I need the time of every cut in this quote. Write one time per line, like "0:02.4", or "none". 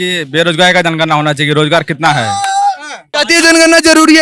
0:03.1